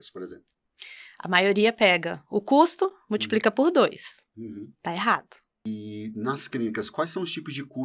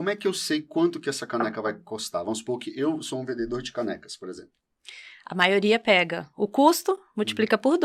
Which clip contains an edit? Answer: first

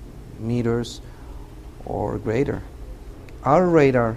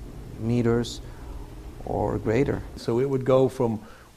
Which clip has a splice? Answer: second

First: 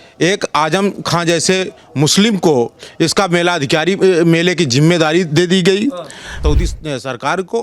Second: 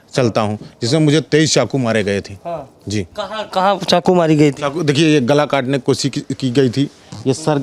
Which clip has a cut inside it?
first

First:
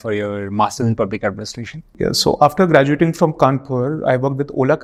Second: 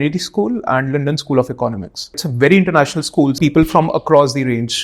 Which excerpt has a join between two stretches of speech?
second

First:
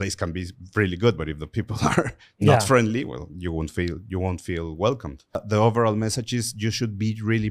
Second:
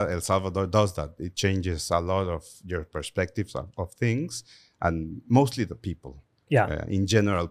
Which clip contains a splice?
first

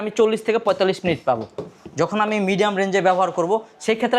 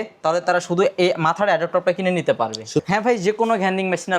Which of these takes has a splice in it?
second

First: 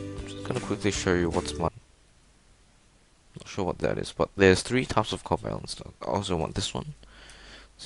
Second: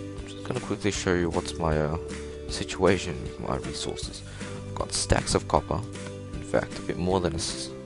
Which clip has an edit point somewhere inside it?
second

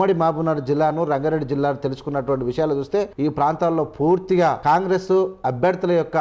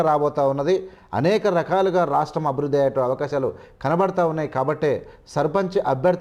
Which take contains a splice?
first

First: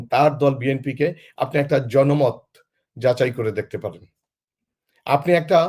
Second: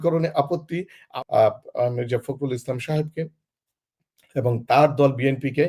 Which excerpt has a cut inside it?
second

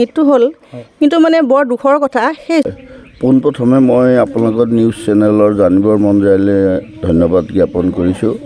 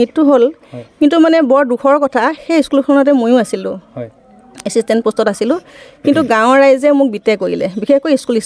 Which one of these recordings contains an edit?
first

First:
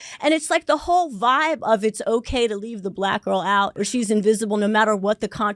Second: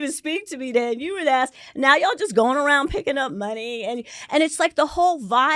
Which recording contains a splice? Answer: first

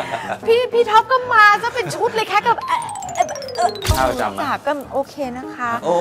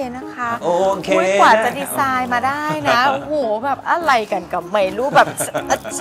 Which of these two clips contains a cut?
first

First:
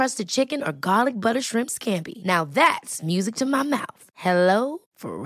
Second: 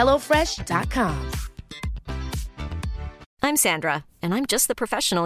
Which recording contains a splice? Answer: second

